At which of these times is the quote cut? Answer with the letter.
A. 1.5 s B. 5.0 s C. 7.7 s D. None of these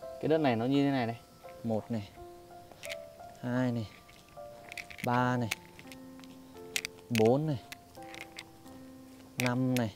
A